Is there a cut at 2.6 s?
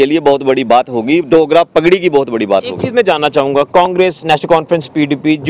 no; 0 cuts

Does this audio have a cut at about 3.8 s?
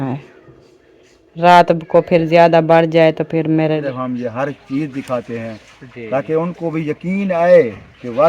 yes; 1 cut; at 3.8 s

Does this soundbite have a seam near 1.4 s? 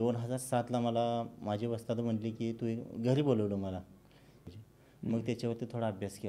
no; 1 cut; at 4.5 s

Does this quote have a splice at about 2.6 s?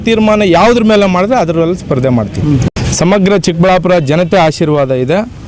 yes; 1 cut; at 2.6 s

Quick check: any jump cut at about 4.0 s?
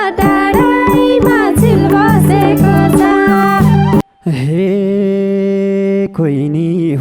yes; 1 cut; at 4.0 s

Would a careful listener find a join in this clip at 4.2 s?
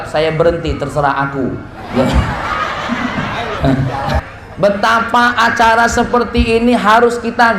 yes; 1 cut; at 4.2 s

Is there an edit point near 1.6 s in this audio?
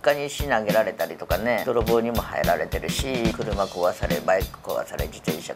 yes; 2 cuts; at 1.6 s, 3.3 s

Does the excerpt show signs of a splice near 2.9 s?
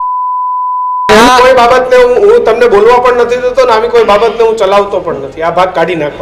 no; 1 cut; at 1.1 s

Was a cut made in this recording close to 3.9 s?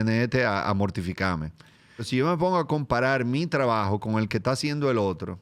no; 1 cut; at 2.1 s

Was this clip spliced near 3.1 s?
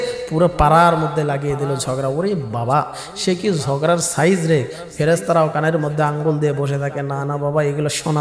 no; 0 cuts

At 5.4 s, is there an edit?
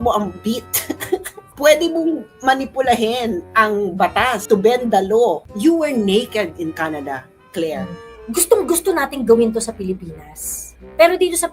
yes; 3 cuts; at 1.5 s, 5.4 s, 8.0 s

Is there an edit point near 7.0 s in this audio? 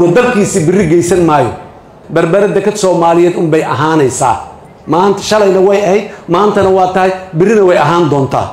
no; 0 cuts

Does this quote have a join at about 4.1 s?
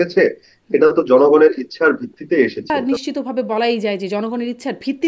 no; 1 cut; at 2.7 s

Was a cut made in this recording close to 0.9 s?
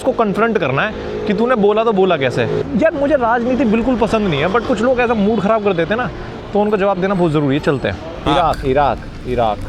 no; 0 cuts

